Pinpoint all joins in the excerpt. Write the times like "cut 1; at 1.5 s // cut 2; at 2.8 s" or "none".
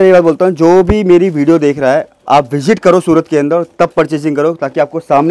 none